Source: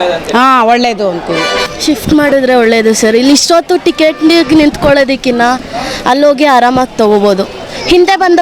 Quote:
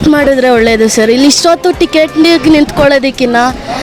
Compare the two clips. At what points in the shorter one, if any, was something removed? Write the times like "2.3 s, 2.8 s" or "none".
none